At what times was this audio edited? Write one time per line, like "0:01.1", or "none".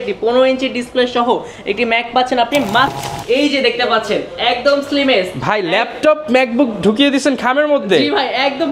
0:02.9